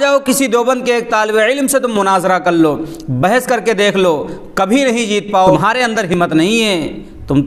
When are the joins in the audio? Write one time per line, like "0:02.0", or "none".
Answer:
0:05.6

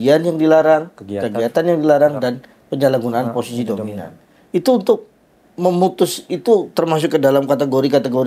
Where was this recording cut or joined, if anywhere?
none

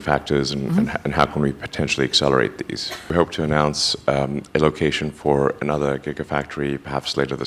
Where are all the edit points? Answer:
0:03.1

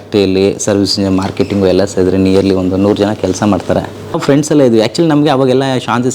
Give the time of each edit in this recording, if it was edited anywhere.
0:04.2

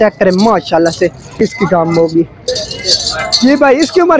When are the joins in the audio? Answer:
0:01.4

